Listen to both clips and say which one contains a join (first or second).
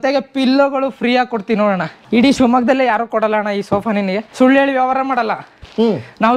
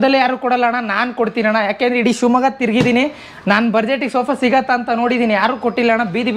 first